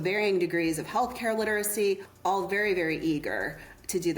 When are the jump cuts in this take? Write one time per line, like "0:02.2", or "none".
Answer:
0:02.1